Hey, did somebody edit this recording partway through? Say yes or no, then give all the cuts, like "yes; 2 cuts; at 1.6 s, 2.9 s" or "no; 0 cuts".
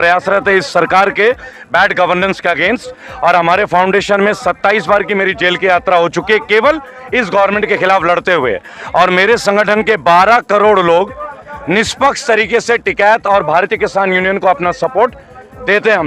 no; 0 cuts